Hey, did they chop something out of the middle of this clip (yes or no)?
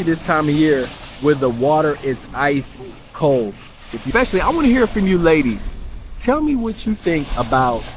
yes